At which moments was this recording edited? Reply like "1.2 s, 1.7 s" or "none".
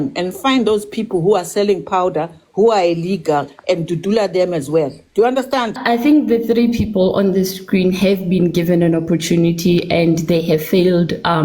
5.8 s